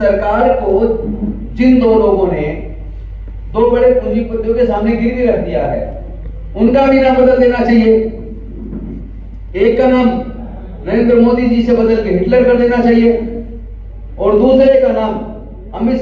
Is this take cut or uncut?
uncut